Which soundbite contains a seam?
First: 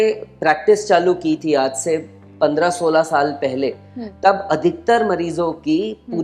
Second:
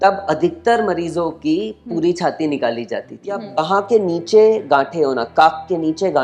second; 1 cut; at 3.5 s

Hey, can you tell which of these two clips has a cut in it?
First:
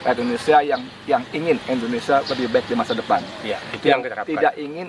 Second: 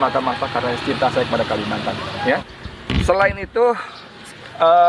second; 1 cut; at 2.4 s

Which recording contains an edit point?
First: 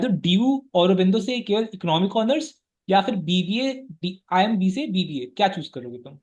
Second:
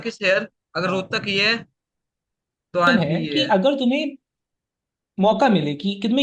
second; 1 cut; at 2.9 s

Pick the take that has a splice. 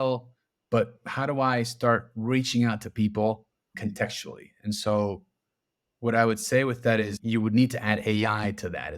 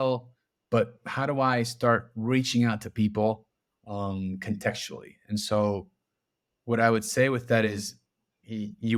first; 2 cuts; at 3.7 s, 7.2 s

